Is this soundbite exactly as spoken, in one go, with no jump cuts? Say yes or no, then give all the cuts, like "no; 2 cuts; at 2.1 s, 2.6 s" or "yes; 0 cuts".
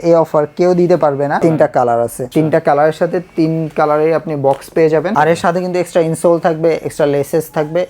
no; 2 cuts; at 1.4 s, 5.1 s